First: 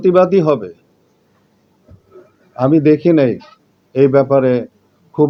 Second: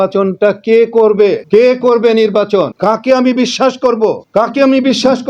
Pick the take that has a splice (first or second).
second